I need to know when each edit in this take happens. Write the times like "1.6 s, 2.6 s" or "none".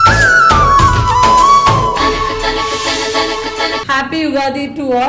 3.9 s